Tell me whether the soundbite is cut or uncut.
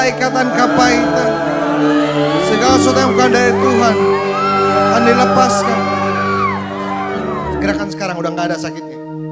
cut